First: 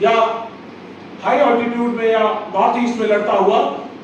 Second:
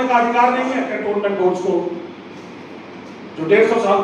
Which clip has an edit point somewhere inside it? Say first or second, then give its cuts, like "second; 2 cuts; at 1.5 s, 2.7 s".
second; 1 cut; at 0.9 s